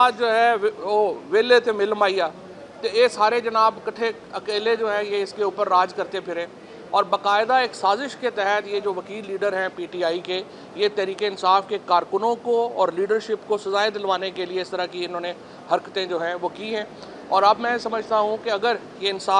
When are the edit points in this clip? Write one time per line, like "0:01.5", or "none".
none